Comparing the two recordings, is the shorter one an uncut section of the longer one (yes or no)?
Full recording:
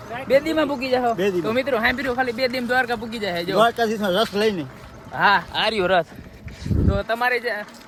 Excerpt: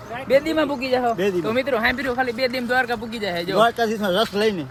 yes